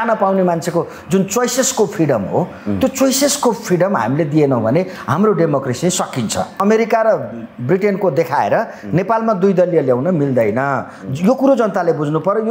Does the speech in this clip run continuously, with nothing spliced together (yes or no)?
no